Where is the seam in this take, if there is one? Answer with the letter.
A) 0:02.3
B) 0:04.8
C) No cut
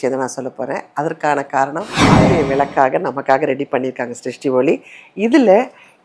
A